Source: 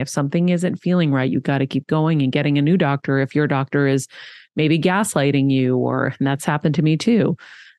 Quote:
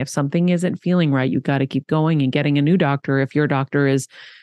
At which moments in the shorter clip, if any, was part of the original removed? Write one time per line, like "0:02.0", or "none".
none